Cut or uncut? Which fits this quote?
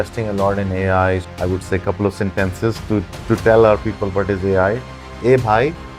cut